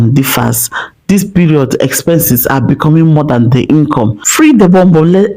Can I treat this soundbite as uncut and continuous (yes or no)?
no